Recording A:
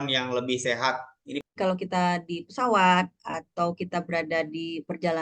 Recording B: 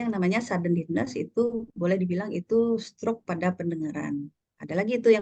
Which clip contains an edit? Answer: A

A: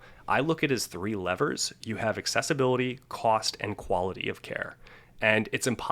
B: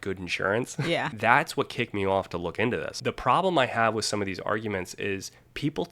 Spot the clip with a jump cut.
B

